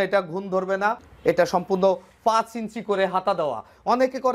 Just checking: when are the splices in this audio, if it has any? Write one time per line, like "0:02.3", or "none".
0:01.1